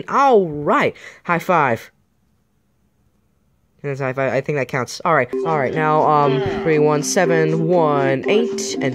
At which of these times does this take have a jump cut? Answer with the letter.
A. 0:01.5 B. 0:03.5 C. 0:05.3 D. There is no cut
C